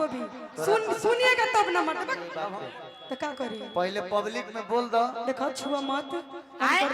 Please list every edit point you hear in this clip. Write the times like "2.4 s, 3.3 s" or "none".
2.3 s